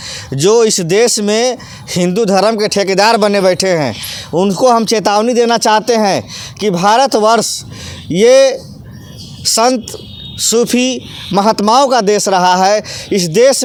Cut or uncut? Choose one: uncut